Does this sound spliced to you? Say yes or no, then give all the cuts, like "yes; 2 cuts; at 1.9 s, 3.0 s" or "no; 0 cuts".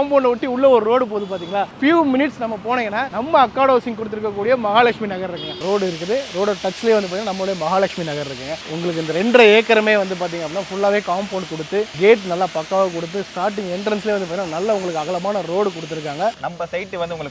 yes; 4 cuts; at 1.7 s, 5.6 s, 8.6 s, 16.4 s